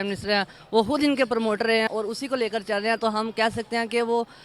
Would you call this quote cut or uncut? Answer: cut